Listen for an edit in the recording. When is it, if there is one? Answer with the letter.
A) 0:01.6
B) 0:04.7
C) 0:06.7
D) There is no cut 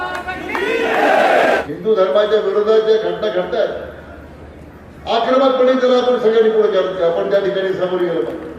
A